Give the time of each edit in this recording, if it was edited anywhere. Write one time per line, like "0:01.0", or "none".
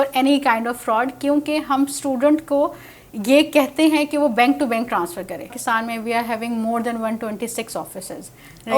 0:05.6